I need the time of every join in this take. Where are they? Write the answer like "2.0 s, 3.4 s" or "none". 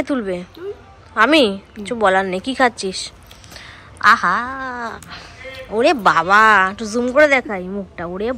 none